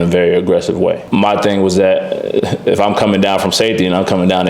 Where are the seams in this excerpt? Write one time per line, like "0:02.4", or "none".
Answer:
0:01.0